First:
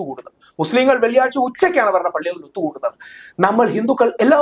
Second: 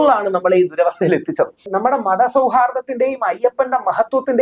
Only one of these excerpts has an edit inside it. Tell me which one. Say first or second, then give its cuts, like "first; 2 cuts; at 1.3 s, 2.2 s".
second; 1 cut; at 1.7 s